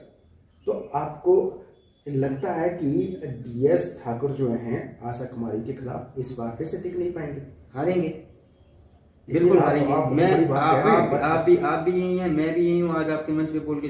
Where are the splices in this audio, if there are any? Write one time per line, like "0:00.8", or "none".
none